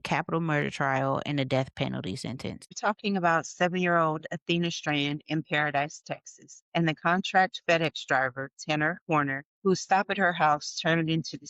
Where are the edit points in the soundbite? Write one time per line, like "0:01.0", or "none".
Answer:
none